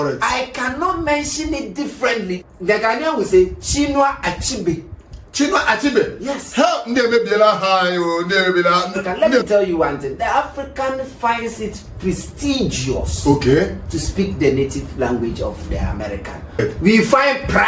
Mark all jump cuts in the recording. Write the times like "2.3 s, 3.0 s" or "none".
2.4 s, 9.0 s, 16.6 s